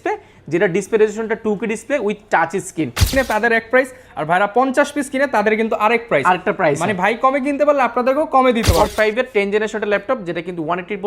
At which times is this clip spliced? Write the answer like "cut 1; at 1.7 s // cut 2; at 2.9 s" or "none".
cut 1; at 3.1 s // cut 2; at 8.9 s